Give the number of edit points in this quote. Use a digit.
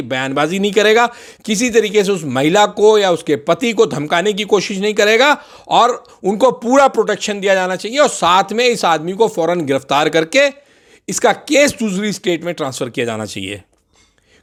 0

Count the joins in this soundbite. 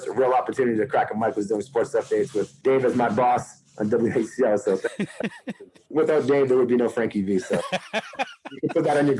2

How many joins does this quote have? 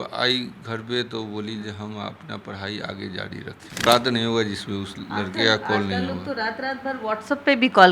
1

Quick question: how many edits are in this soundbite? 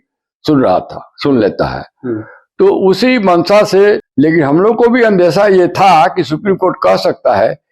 1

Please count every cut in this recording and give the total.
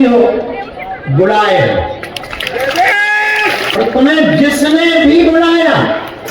1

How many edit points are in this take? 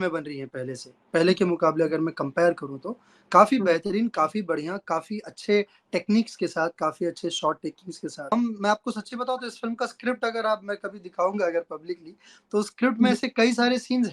1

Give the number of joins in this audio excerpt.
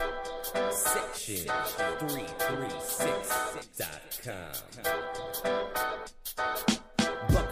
1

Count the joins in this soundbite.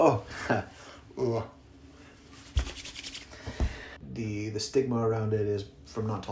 1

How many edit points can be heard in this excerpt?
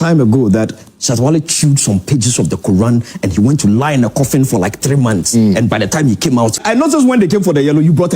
1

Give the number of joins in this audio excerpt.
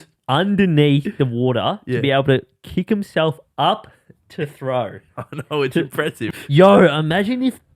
1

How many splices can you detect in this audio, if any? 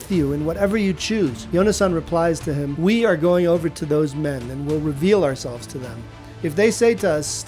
2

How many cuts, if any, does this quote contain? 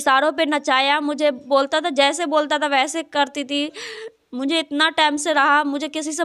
0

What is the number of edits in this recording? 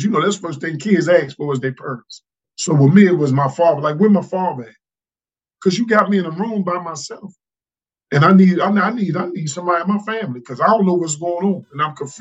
1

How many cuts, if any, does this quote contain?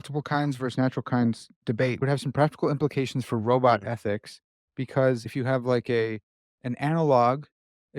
2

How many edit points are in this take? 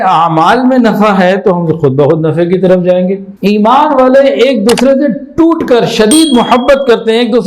1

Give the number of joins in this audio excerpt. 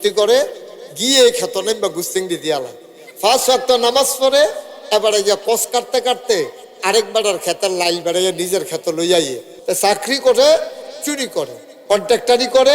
1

